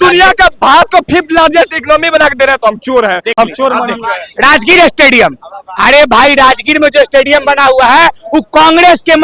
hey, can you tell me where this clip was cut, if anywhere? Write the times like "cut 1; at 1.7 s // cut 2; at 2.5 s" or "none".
none